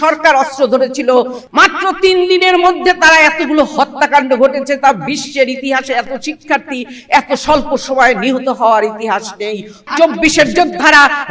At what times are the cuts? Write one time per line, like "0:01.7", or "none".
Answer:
0:01.4
0:09.9